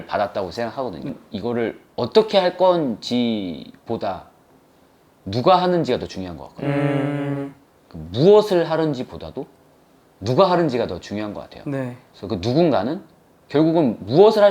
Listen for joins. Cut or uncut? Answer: cut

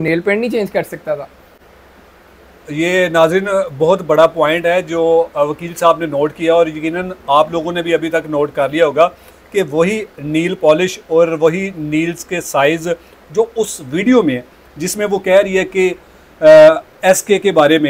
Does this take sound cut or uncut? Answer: uncut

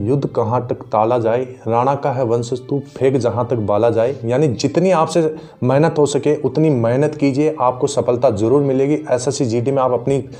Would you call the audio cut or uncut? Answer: uncut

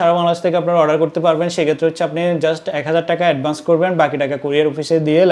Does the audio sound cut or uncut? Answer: uncut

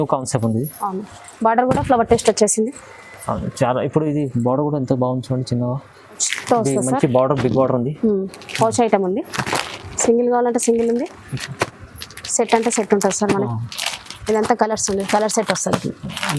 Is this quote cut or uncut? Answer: cut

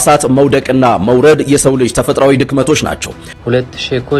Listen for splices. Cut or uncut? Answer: cut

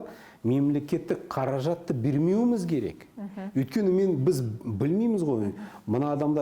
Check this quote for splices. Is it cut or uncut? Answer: uncut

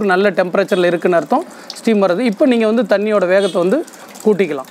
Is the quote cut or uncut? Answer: uncut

